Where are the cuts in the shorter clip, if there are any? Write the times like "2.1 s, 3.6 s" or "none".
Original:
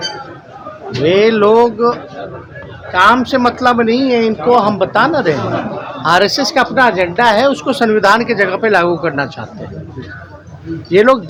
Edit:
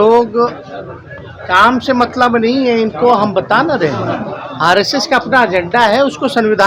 none